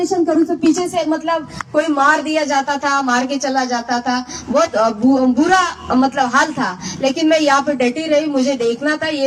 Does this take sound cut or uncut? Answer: uncut